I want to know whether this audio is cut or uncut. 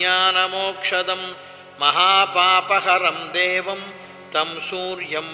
uncut